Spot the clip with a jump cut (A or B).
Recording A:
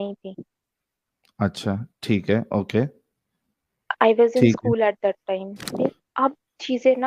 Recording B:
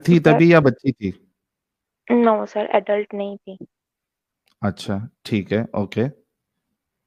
A